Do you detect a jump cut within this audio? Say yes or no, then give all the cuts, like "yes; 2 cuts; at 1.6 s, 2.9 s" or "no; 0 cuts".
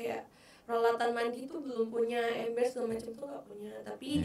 no; 0 cuts